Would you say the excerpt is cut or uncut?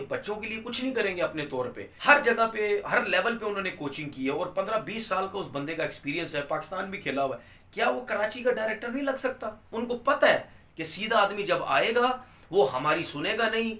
cut